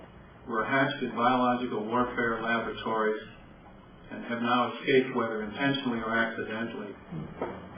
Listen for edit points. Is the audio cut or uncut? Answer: uncut